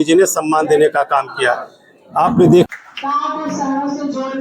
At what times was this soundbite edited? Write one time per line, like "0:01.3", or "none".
0:02.7